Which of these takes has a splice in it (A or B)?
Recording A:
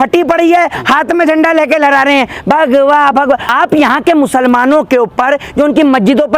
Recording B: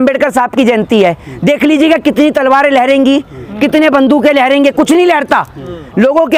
A